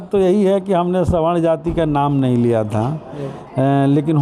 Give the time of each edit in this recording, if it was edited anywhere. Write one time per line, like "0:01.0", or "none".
none